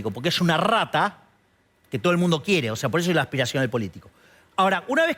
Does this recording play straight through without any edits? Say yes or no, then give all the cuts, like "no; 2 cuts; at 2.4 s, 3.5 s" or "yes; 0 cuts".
yes; 0 cuts